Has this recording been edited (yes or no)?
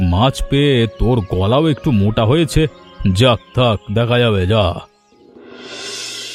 no